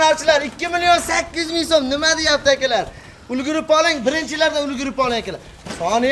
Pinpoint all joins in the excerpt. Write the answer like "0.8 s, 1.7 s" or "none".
none